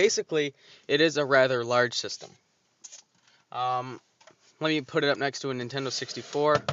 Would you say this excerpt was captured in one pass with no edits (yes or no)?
yes